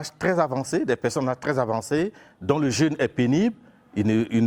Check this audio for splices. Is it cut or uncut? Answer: uncut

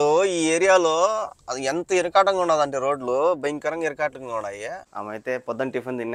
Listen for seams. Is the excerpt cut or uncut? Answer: cut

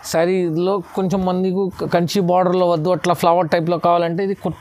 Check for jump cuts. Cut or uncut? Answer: uncut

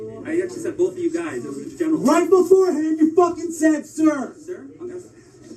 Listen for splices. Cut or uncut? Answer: cut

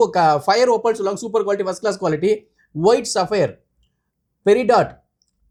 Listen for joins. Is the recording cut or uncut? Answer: uncut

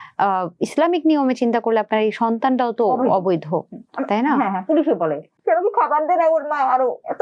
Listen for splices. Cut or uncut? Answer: cut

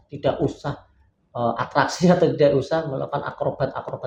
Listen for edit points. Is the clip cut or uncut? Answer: uncut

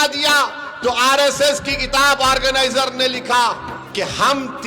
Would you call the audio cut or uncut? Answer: cut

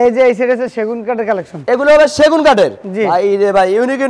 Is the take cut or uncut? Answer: uncut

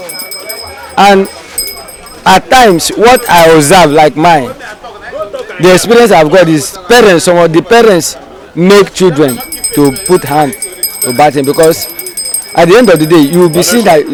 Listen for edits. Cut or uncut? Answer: uncut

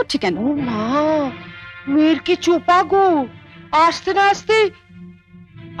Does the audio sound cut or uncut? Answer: uncut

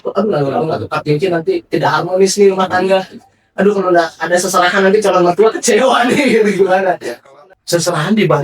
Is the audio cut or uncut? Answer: cut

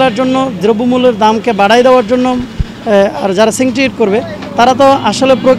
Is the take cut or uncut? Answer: uncut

